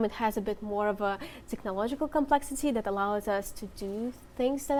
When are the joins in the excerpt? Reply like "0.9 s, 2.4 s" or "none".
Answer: none